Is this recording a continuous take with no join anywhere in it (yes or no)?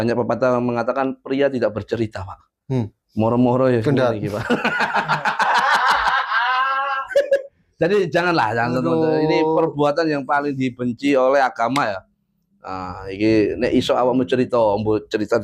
yes